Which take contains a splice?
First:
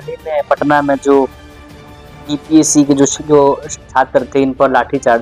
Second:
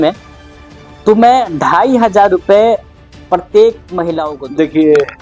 second; 1 cut; at 4.2 s

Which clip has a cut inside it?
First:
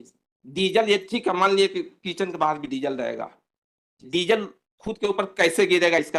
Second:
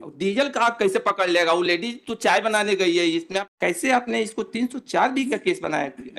second; 1 cut; at 3.5 s

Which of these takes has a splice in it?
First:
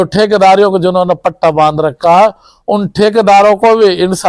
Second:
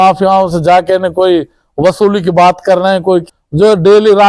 second; 1 cut; at 3.3 s

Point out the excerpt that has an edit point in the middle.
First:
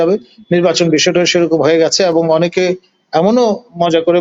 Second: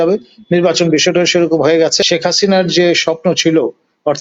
second; 1 cut; at 2.0 s

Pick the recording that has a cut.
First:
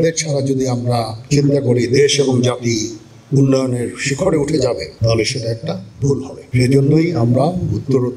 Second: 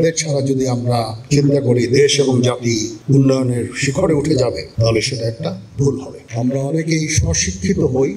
second; 2 cuts; at 2.9 s, 6.1 s

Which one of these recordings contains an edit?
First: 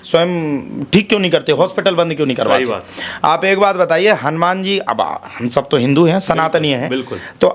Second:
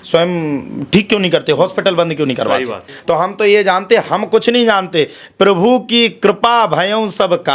second; 1 cut; at 2.9 s

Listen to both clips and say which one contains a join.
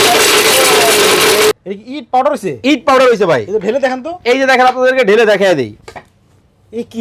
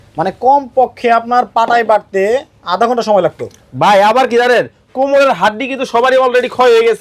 first; 1 cut; at 1.6 s

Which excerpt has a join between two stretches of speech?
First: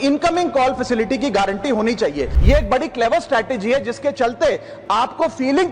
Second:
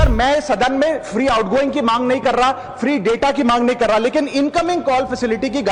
first; 1 cut; at 2.3 s

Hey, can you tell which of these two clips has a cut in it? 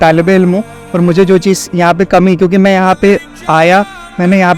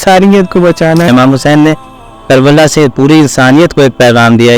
second; 1 cut; at 1.1 s

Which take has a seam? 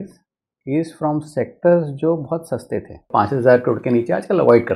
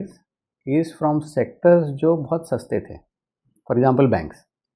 first; 1 cut; at 3.1 s

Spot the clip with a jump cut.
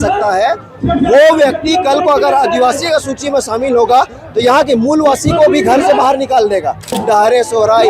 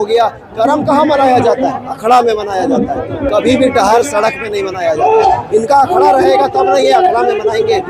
first; 1 cut; at 6.9 s

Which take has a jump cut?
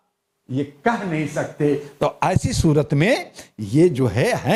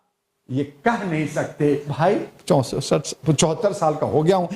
second; 1 cut; at 1.9 s

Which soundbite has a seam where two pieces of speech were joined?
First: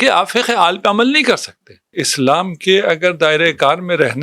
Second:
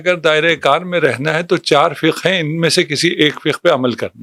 first; 1 cut; at 2.0 s

